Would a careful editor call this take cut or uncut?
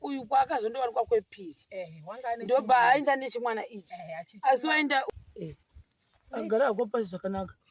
cut